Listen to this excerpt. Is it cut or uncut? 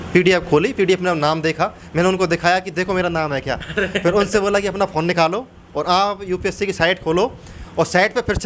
uncut